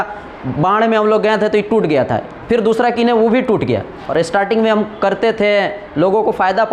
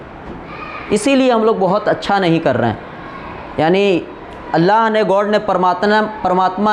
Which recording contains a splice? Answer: first; 1 cut; at 4.0 s

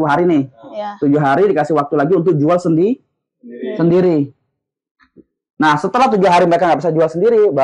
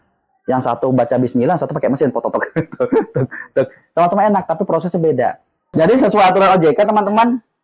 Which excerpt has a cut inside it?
second; 1 cut; at 5.7 s

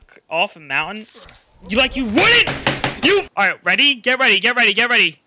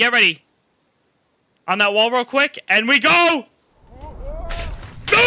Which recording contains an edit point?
first; 1 cut; at 3.3 s

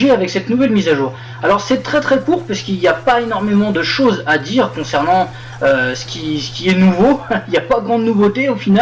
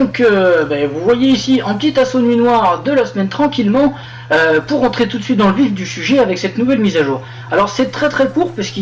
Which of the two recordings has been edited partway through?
first; 1 cut; at 5.5 s

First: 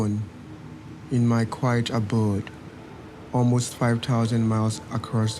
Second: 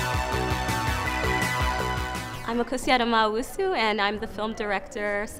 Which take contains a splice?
first; 1 cut; at 2.1 s

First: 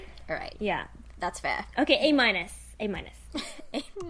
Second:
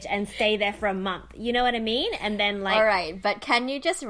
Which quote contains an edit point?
first; 1 cut; at 3.2 s

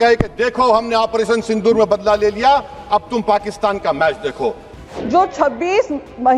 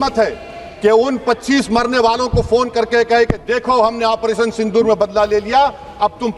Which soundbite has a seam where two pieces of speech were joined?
first; 1 cut; at 4.7 s

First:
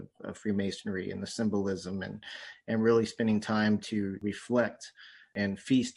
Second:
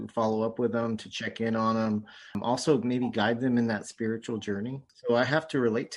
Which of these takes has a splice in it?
second; 1 cut; at 4.8 s

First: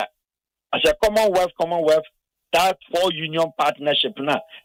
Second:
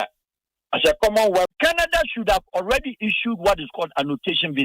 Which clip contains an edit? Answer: second; 1 cut; at 1.5 s

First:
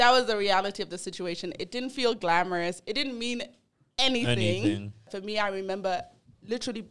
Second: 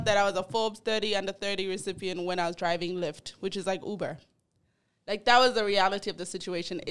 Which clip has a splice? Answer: first; 1 cut; at 5.2 s

